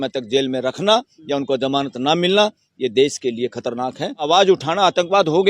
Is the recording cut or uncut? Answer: cut